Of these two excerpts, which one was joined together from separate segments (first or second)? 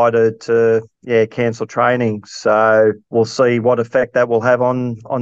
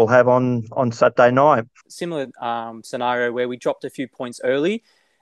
second